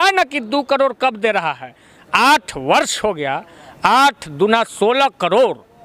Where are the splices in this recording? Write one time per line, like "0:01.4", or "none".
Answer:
none